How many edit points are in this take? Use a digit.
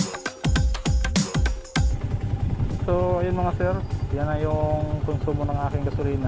1